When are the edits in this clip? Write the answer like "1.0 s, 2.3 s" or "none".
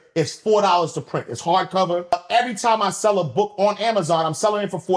2.1 s